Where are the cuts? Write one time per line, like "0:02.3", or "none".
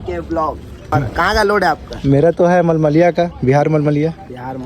0:00.9